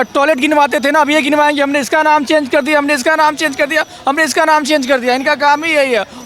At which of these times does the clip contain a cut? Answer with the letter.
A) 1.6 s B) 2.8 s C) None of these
C